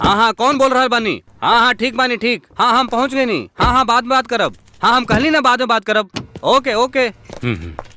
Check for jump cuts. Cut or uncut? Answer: uncut